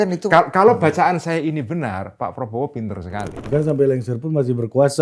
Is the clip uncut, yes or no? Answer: no